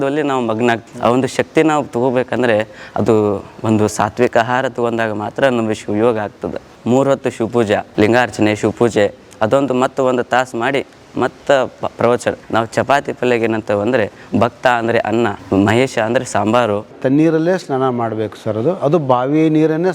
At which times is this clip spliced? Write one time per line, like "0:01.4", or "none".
0:00.9
0:06.7
0:07.9
0:12.4
0:15.4
0:16.9